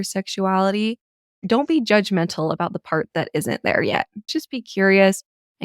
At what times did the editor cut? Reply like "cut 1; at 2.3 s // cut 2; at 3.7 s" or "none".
cut 1; at 4.3 s